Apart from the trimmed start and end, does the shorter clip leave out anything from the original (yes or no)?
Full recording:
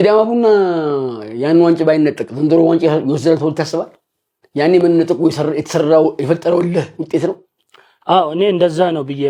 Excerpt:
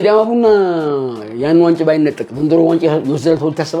no